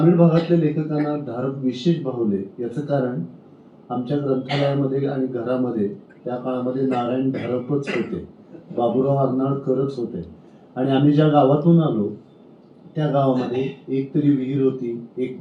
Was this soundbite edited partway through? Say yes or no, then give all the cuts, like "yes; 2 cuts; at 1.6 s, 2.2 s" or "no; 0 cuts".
no; 0 cuts